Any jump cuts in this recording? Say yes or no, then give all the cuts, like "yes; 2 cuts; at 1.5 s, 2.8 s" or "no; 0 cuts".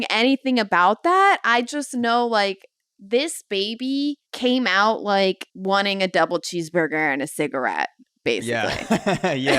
yes; 2 cuts; at 4.3 s, 5.5 s